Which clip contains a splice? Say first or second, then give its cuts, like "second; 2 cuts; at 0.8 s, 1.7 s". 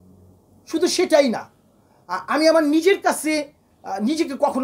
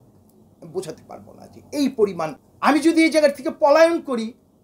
second; 1 cut; at 2.4 s